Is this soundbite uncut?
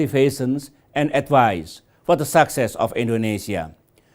no; 1 cut; at 2.8 s

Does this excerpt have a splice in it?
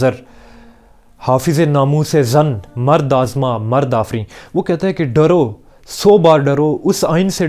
no; 0 cuts

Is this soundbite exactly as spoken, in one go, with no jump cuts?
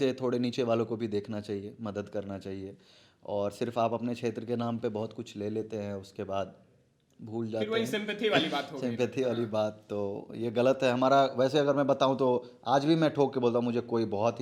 yes; 0 cuts

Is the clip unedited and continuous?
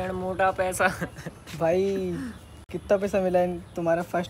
yes; 0 cuts

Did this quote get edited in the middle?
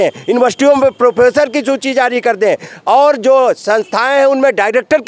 no; 0 cuts

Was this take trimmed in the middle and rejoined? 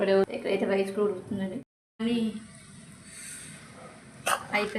yes; 1 cut; at 1.8 s

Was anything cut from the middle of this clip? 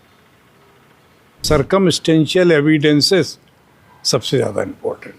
yes; 1 cut; at 1.4 s

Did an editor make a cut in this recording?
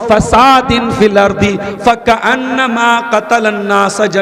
no; 0 cuts

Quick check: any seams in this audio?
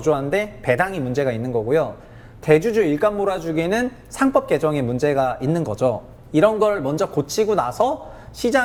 no; 0 cuts

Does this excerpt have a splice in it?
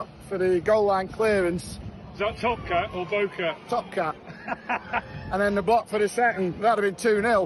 no; 0 cuts

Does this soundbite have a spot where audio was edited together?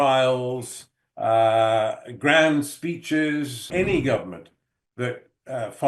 yes; 1 cut; at 3.6 s

